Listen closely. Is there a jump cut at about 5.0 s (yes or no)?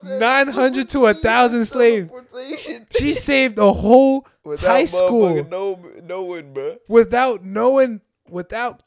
no